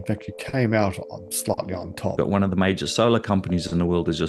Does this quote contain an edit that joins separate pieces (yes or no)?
yes